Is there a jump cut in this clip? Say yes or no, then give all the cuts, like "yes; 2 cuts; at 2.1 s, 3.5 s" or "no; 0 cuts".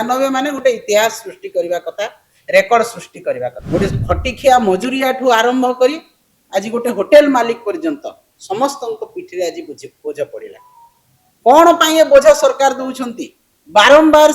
yes; 1 cut; at 3.6 s